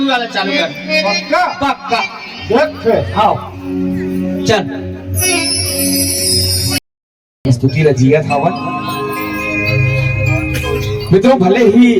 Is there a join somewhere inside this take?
no; 0 cuts

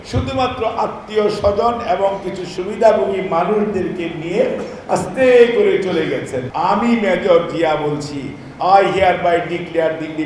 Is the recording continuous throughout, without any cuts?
yes; 0 cuts

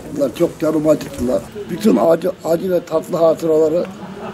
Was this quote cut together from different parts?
yes; 1 cut; at 1.6 s

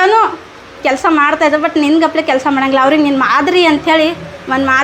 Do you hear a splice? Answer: no; 0 cuts

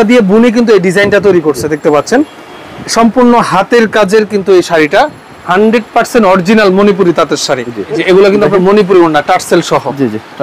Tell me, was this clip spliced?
yes; 1 cut; at 8.0 s

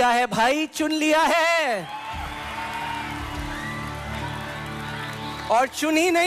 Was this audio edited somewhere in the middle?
no; 0 cuts

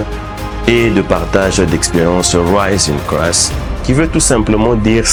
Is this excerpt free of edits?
yes; 0 cuts

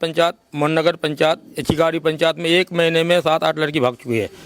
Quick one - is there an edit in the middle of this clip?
no; 0 cuts

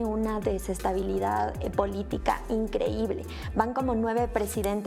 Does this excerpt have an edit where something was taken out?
no; 0 cuts

